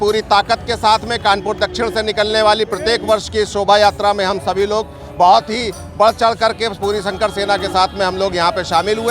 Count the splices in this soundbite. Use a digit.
0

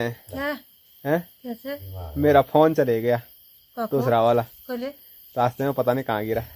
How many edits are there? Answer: 0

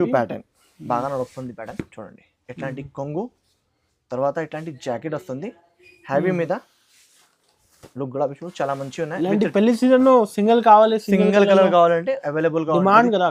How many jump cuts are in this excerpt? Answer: 0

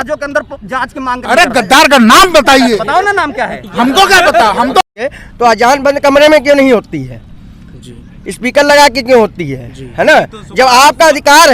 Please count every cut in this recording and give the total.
1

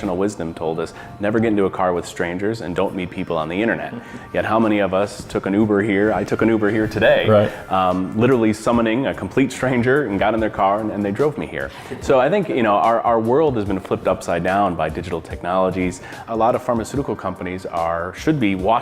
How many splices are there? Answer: 1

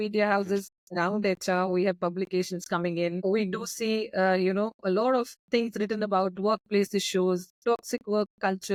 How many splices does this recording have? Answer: 0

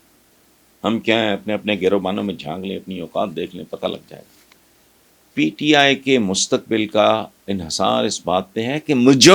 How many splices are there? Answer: 1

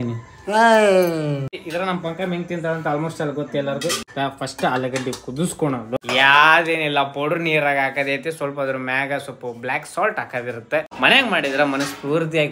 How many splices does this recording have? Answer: 4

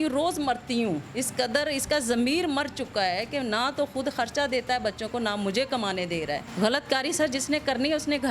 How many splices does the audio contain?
2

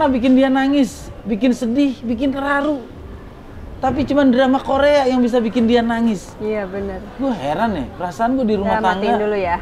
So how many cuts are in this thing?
0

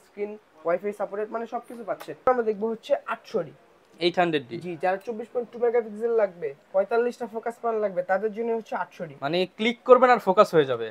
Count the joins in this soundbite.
1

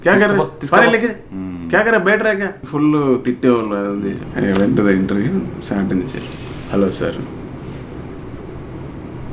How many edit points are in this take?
1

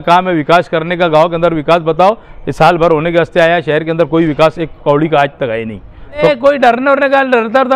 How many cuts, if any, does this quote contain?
1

